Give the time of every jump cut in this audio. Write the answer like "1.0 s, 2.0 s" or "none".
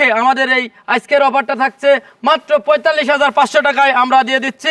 none